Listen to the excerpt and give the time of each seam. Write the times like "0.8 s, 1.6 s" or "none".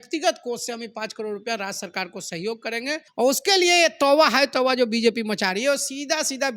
3.0 s